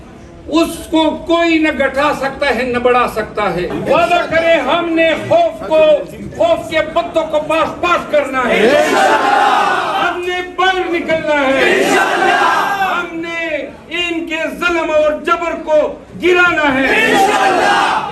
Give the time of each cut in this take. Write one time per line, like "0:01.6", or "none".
0:03.7